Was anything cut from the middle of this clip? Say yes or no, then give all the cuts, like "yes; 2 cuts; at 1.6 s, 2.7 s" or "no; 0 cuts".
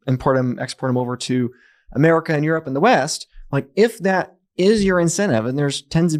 no; 0 cuts